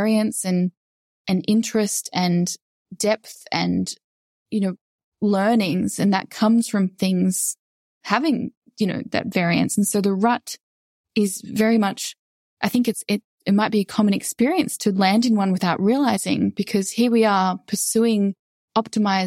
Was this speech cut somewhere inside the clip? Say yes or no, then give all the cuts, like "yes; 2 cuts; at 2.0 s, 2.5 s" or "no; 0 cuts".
no; 0 cuts